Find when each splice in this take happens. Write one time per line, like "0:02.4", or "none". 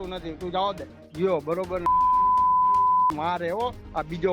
0:01.0